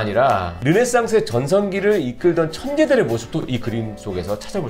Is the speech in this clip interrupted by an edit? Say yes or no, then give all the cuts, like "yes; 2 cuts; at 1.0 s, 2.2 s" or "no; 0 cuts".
no; 0 cuts